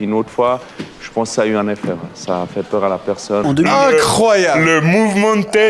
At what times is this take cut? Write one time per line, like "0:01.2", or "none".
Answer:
0:03.4